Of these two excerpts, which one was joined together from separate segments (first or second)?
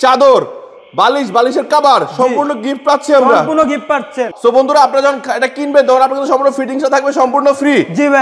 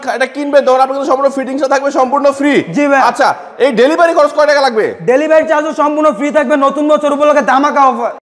first